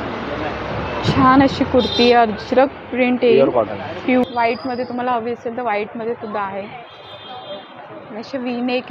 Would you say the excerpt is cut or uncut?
cut